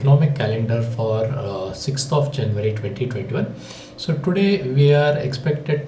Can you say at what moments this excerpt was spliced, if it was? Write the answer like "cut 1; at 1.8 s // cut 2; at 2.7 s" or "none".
none

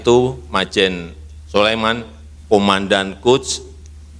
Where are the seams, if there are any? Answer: cut 1; at 2.3 s

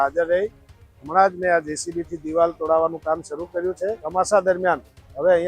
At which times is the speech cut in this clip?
cut 1; at 4.0 s

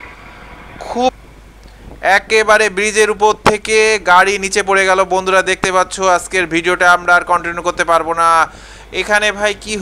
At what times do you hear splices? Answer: cut 1; at 1.2 s

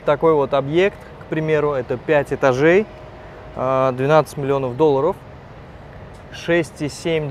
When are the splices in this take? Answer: none

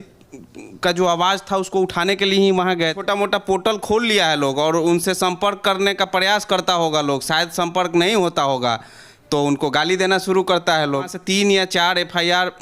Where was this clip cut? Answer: cut 1; at 3.0 s // cut 2; at 11.2 s

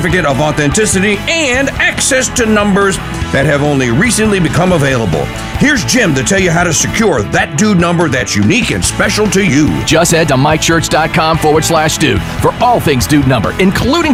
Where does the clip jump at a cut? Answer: none

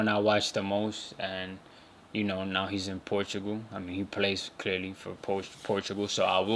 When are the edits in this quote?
none

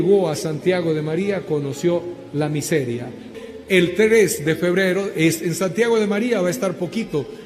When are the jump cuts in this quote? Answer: none

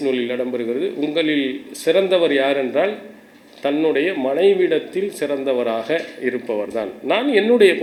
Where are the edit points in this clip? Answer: none

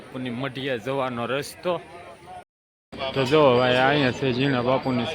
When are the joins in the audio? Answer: cut 1; at 2.4 s

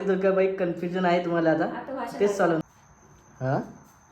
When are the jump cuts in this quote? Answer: cut 1; at 2.6 s

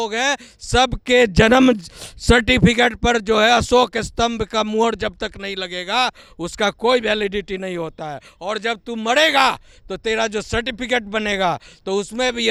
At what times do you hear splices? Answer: none

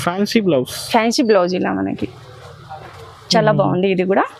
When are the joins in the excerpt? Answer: none

